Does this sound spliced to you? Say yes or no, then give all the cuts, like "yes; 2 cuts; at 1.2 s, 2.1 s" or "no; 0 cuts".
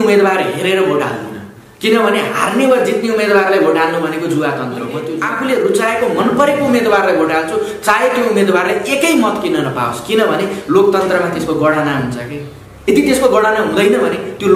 yes; 1 cut; at 5.0 s